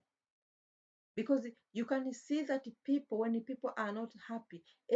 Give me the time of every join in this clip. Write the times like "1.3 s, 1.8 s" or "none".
none